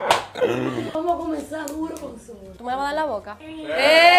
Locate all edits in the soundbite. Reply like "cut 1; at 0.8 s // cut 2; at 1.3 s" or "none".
cut 1; at 0.9 s